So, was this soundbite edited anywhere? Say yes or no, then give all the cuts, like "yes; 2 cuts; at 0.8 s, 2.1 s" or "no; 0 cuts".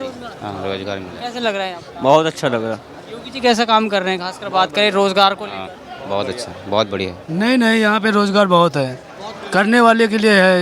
yes; 1 cut; at 7.2 s